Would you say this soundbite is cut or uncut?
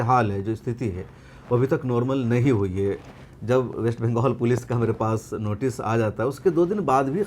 uncut